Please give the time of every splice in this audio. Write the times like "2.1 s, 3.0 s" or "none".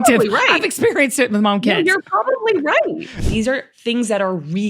3.2 s